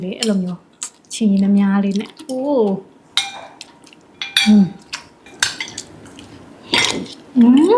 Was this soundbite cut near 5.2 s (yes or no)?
yes